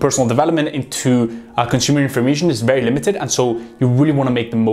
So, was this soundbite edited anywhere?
no; 0 cuts

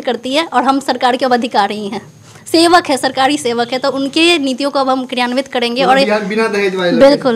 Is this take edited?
no; 0 cuts

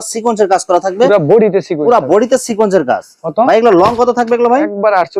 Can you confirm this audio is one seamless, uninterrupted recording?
yes; 0 cuts

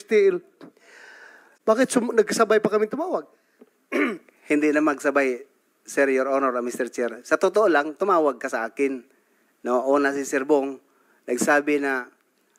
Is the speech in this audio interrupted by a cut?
yes; 1 cut; at 1.4 s

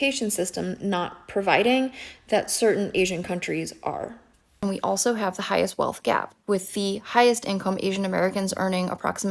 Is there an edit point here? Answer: yes; 1 cut; at 4.5 s

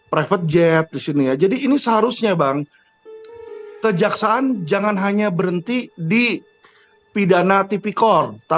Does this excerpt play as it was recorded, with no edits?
yes; 0 cuts

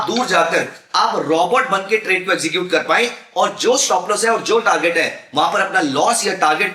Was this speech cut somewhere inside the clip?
no; 0 cuts

